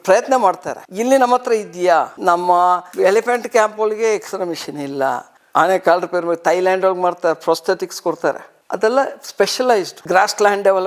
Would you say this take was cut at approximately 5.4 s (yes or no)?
yes